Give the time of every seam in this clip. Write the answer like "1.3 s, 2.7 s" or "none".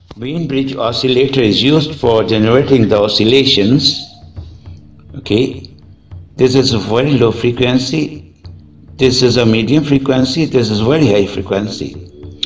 none